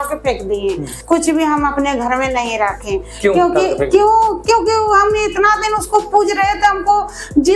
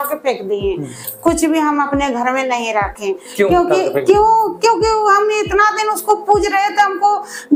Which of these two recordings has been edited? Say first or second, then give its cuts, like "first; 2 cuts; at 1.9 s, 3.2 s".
first; 1 cut; at 0.9 s